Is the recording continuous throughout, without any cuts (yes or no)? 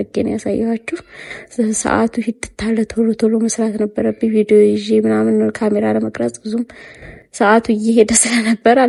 yes